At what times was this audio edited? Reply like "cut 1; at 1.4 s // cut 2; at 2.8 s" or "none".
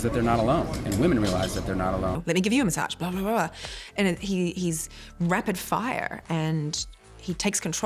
cut 1; at 2.2 s